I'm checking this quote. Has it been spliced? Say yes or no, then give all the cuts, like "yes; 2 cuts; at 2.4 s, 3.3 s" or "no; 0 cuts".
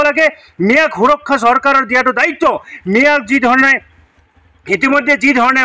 no; 0 cuts